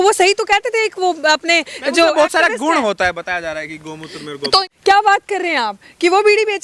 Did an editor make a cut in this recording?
yes; 1 cut; at 4.6 s

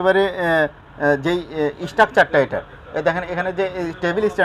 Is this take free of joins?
yes; 0 cuts

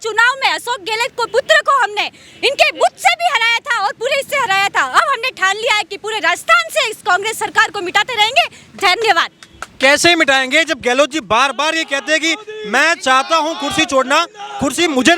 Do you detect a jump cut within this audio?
no; 0 cuts

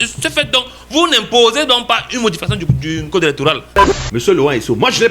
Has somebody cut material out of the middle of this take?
yes; 1 cut; at 3.9 s

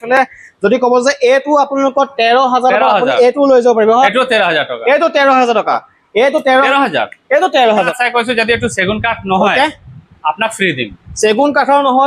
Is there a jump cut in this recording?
yes; 3 cuts; at 4.1 s, 6.7 s, 7.9 s

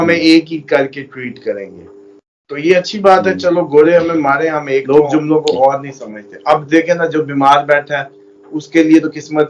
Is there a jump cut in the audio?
yes; 1 cut; at 4.8 s

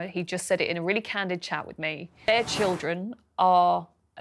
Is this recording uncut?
no; 1 cut; at 2.3 s

